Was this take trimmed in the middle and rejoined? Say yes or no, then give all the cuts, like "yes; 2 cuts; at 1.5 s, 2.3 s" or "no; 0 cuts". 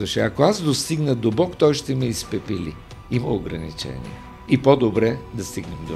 yes; 1 cut; at 2.9 s